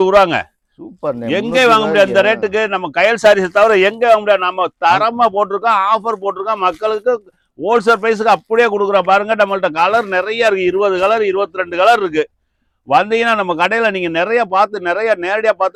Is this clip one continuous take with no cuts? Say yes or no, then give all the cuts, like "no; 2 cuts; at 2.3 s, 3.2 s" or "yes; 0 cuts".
yes; 0 cuts